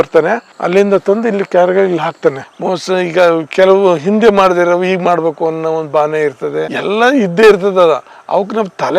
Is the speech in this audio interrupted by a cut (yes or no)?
yes